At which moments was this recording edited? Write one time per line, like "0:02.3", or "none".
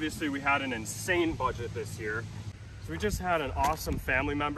0:02.4